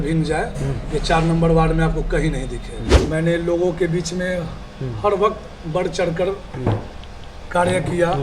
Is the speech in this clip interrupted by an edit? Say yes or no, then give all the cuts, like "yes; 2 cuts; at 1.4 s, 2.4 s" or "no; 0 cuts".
yes; 1 cut; at 2.8 s